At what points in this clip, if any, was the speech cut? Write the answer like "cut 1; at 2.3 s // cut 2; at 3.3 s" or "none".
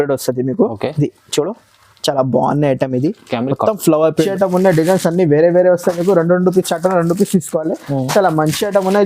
cut 1; at 4.3 s